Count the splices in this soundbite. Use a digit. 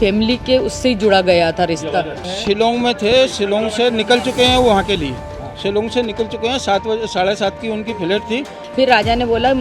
2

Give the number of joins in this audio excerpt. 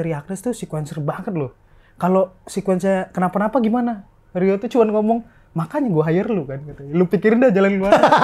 0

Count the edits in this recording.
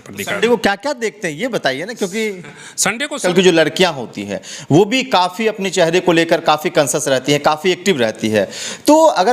1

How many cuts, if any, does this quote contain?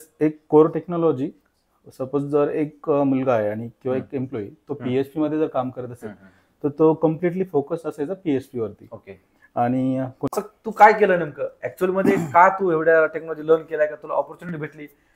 1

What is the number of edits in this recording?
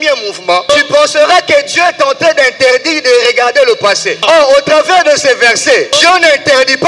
3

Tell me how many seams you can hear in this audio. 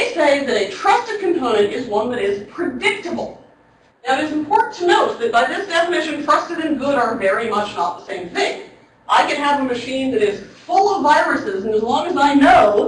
1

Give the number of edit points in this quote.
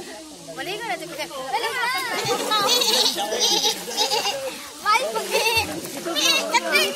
1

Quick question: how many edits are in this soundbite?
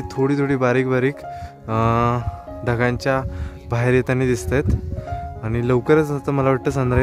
0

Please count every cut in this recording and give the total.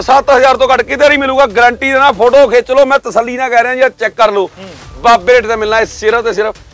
0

